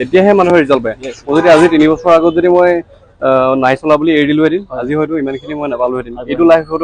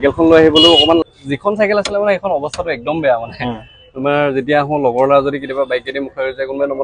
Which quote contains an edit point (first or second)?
second